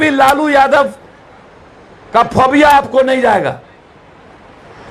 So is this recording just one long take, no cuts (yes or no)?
yes